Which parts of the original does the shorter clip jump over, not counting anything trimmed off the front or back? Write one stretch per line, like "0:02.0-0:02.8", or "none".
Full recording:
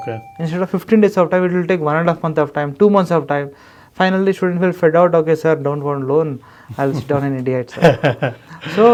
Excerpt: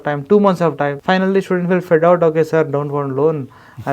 0:03.5-0:03.9